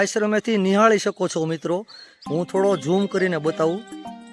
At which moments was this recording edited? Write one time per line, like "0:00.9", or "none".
none